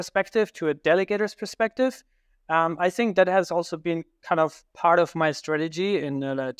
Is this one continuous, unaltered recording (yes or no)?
yes